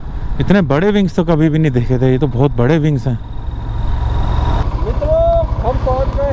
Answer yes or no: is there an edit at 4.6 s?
yes